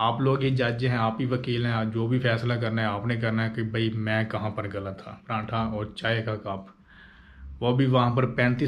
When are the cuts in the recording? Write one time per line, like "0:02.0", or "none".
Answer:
0:05.2